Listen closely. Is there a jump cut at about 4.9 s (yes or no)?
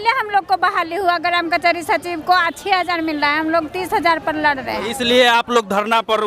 no